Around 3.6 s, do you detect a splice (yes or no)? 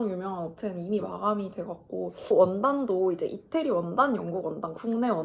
no